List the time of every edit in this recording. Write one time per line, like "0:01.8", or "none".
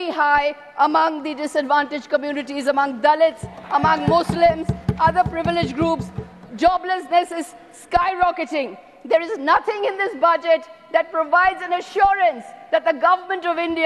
none

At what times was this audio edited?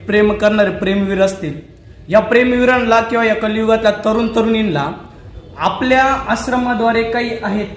none

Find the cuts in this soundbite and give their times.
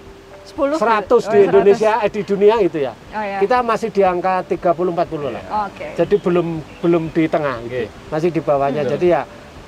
none

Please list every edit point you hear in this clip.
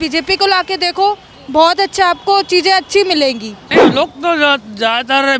0:03.6

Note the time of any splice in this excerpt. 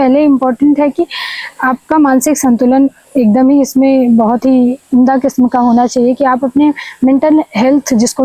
none

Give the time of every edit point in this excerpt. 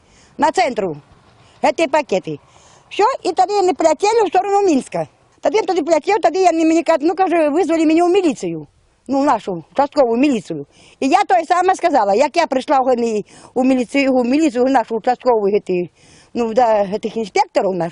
0:05.5

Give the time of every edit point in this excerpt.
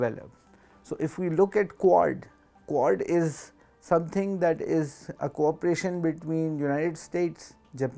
none

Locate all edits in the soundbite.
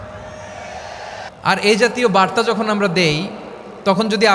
0:01.3

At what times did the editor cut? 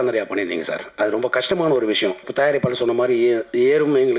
0:02.3

